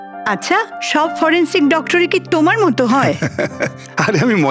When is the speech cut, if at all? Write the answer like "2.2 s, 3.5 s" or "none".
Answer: 3.2 s